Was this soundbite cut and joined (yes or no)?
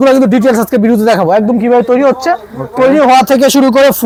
no